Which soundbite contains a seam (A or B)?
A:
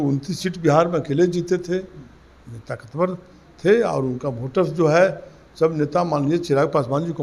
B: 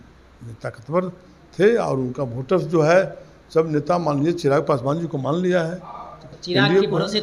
B